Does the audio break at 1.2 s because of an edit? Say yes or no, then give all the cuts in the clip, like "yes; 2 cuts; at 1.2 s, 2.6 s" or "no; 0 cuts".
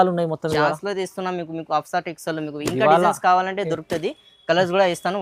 no; 0 cuts